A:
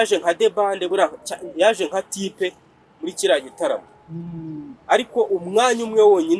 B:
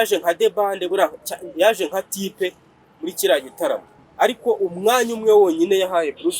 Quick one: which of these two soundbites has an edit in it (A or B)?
B